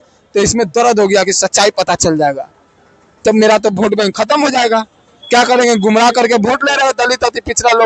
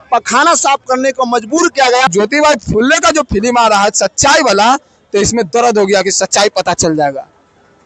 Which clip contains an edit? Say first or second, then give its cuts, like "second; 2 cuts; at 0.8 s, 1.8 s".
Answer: second; 1 cut; at 2.1 s